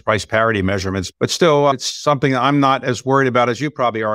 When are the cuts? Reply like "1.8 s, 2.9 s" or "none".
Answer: 1.1 s, 1.7 s

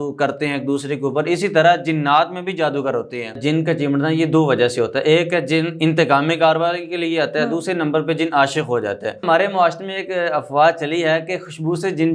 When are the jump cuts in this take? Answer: 3.4 s, 9.2 s

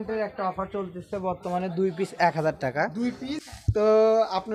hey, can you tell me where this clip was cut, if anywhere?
3.5 s

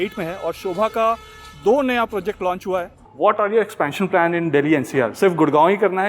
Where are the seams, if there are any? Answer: 3.1 s

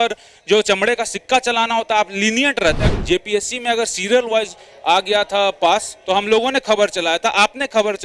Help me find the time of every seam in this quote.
2.8 s

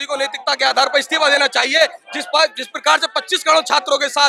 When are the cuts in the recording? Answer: none

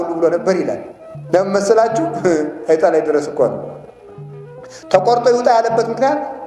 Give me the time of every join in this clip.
none

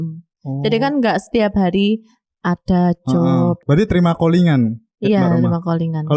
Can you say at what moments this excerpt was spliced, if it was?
3.6 s

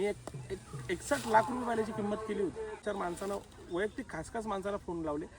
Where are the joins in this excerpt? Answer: 2.8 s

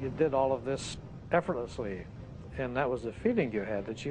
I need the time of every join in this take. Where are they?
0.9 s

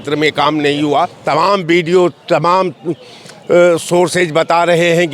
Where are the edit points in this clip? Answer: 1.2 s

